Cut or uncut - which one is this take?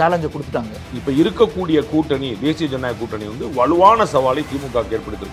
uncut